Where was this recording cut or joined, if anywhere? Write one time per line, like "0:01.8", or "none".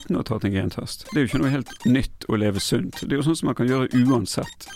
0:01.7